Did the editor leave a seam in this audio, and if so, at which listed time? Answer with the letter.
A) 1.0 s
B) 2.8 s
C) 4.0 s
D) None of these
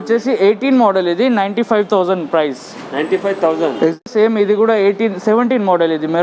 C